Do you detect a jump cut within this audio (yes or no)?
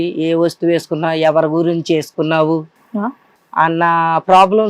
no